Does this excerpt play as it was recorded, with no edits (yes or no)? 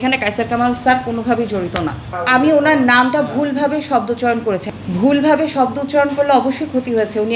no